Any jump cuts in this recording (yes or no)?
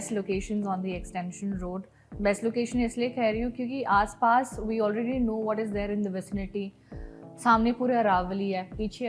no